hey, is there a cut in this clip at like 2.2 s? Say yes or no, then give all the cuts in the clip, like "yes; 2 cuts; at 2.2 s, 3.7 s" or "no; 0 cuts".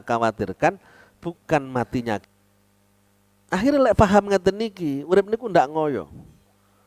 yes; 1 cut; at 2.2 s